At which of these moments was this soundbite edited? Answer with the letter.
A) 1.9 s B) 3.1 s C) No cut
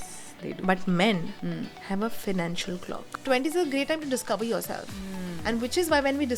B